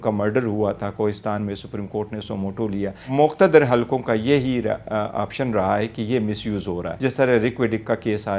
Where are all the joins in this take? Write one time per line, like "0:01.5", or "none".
0:03.1
0:06.9

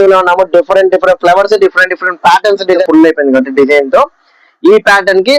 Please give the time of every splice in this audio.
0:02.8

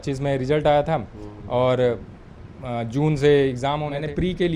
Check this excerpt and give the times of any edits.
0:03.6

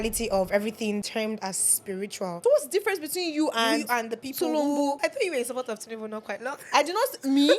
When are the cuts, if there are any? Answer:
0:01.1
0:02.4
0:05.0

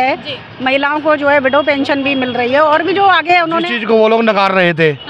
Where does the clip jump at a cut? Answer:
0:03.6

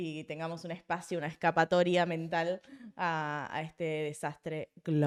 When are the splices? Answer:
none

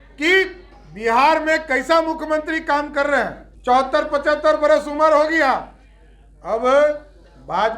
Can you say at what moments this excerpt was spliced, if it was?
0:03.5

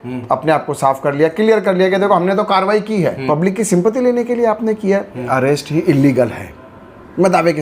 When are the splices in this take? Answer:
0:03.2
0:05.3

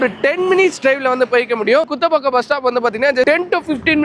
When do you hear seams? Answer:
0:01.9
0:03.2

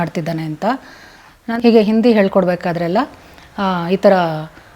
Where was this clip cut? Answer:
0:01.4

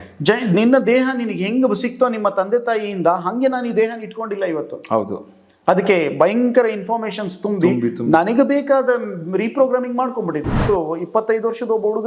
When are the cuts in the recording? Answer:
0:10.6

